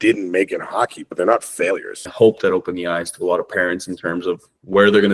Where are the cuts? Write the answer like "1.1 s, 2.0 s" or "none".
2.1 s